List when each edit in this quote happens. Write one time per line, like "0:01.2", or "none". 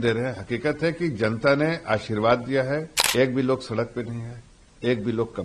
0:03.0